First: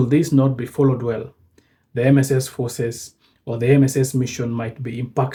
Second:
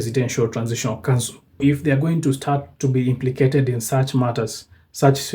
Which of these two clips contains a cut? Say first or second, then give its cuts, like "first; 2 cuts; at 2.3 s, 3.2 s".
second; 1 cut; at 1.6 s